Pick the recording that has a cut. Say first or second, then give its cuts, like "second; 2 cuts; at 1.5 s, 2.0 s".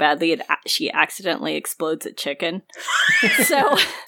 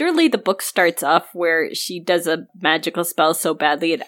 second; 1 cut; at 2.5 s